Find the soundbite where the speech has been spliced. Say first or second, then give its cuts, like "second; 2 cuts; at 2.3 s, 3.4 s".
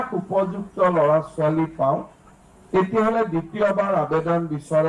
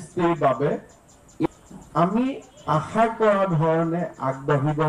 second; 1 cut; at 1.5 s